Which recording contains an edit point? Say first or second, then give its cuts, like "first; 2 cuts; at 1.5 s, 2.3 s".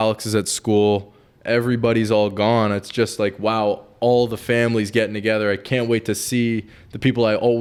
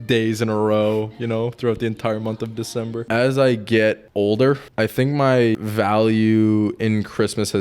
second; 4 cuts; at 3.0 s, 4.0 s, 4.7 s, 5.6 s